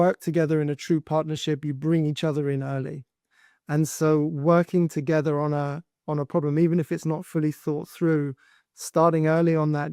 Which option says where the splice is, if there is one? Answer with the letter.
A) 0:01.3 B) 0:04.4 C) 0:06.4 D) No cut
D